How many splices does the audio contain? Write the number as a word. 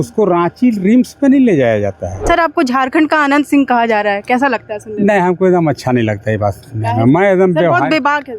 one